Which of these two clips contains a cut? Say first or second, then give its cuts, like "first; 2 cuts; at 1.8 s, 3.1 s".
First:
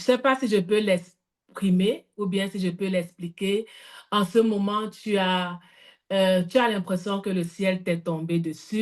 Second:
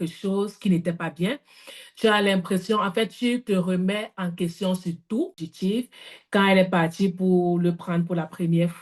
second; 1 cut; at 5.4 s